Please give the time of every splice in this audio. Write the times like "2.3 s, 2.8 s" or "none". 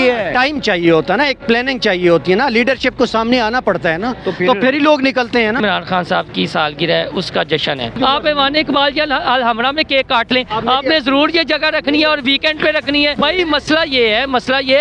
5.6 s, 8.0 s, 13.2 s